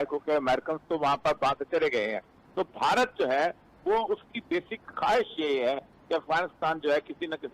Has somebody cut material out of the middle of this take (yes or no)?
no